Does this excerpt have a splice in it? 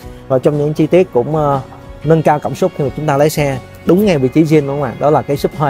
no; 0 cuts

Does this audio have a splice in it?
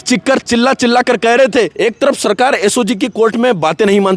yes; 1 cut; at 1.7 s

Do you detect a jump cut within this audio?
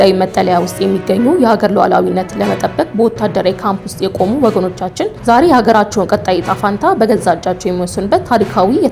no; 0 cuts

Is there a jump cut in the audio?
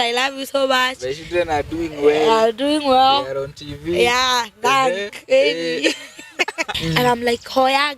yes; 1 cut; at 6.7 s

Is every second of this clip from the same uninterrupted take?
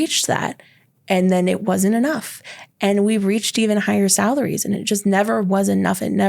no; 1 cut; at 4.8 s

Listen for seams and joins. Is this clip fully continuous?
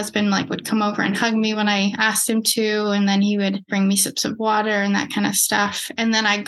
no; 1 cut; at 3.7 s

